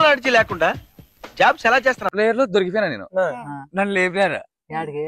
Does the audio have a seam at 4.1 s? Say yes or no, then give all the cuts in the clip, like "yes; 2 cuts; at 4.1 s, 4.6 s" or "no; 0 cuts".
no; 1 cut; at 2.0 s